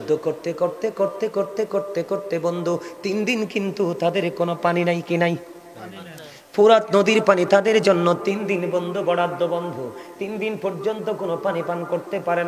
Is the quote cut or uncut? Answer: uncut